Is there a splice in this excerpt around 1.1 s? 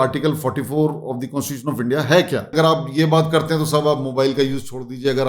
no; 1 cut; at 2.5 s

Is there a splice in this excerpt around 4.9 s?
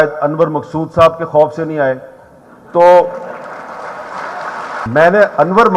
yes; 1 cut; at 4.9 s

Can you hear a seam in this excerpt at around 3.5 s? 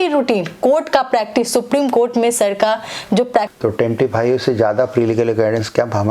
yes; 1 cut; at 3.5 s

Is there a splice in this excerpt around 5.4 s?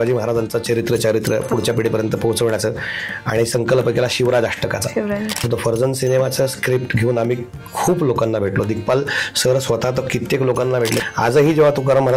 yes; 2 cuts; at 5.4 s, 11.0 s

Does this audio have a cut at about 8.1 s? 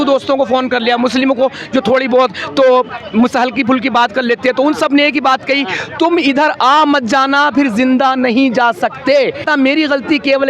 no; 1 cut; at 9.4 s

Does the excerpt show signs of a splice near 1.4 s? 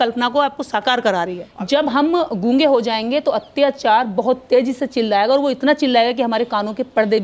yes; 1 cut; at 1.4 s

